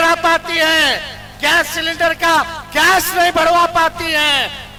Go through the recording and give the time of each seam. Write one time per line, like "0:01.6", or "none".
none